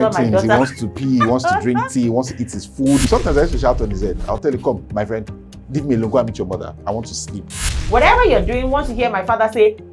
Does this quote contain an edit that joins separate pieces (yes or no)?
yes